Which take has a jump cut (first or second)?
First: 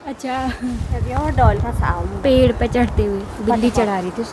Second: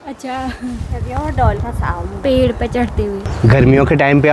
second